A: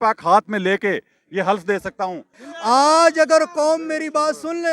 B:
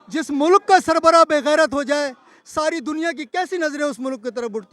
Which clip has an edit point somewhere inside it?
A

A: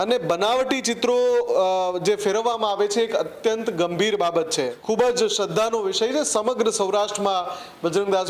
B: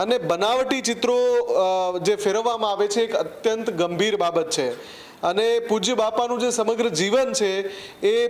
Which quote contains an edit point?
A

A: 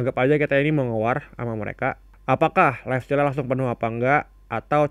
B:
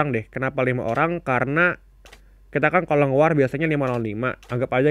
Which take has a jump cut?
A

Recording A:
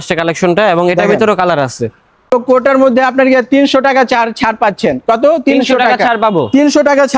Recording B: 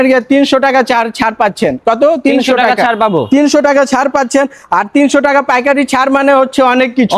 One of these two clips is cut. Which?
A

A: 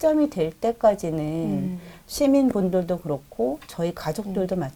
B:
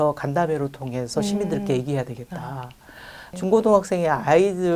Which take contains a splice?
B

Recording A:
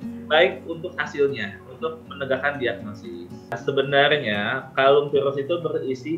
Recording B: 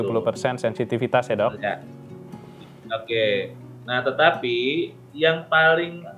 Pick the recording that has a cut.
A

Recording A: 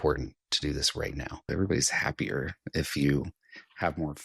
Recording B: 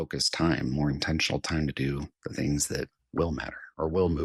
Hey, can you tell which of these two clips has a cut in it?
A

